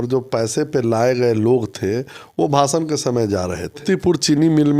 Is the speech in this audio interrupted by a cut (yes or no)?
yes